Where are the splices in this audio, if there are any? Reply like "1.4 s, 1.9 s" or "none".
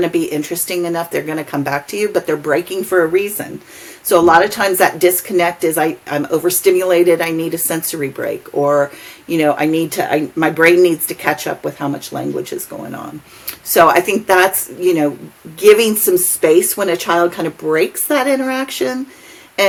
none